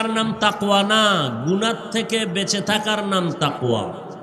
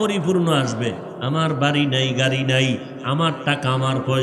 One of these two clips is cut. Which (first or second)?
second